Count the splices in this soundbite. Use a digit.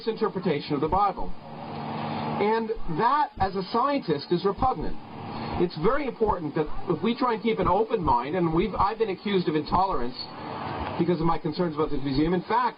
0